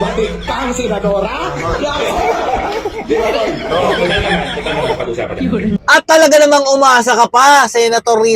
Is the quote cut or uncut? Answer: uncut